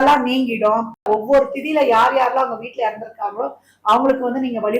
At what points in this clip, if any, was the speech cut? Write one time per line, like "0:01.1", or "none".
0:01.1